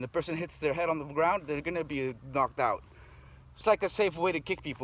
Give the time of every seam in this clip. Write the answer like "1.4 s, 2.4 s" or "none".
3.6 s